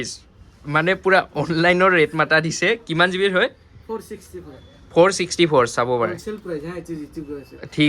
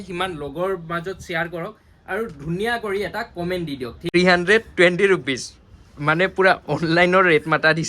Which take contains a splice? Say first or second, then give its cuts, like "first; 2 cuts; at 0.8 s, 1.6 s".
second; 1 cut; at 4.0 s